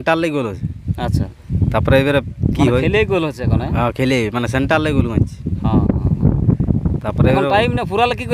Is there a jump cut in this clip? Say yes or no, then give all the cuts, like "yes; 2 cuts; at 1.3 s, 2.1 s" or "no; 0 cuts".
no; 0 cuts